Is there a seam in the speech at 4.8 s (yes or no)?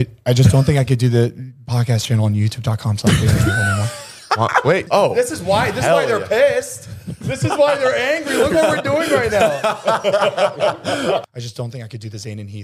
yes